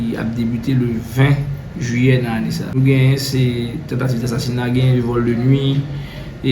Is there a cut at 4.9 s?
no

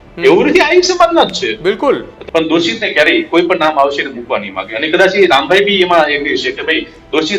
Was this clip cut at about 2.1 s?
yes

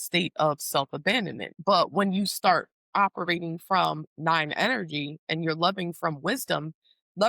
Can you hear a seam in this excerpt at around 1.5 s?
yes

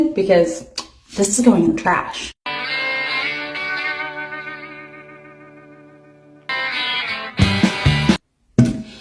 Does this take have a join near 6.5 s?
yes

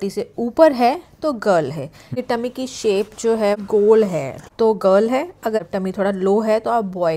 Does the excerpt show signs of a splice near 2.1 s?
yes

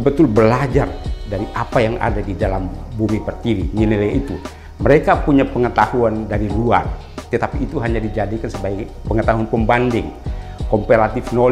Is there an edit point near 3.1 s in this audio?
no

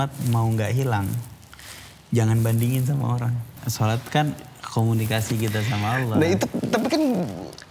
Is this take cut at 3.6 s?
yes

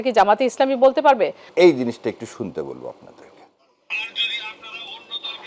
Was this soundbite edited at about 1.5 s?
yes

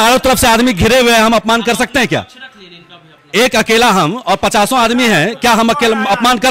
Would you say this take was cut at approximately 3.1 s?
no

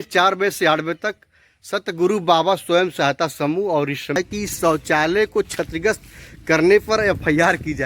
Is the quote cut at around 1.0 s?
no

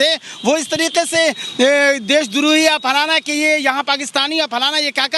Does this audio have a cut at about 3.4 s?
no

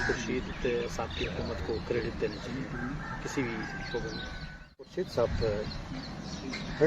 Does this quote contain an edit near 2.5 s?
no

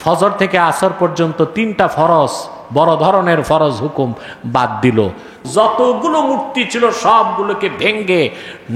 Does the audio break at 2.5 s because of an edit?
no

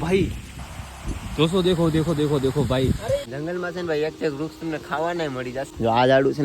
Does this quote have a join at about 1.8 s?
no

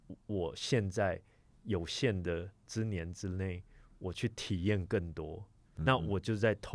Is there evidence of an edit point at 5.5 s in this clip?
no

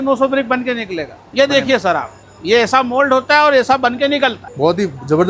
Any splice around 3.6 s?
no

